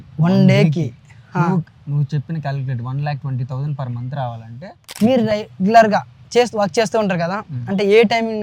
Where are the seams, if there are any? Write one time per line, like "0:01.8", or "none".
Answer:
0:04.8